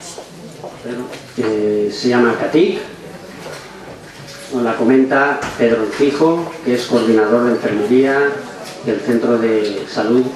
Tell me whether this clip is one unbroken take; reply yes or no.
yes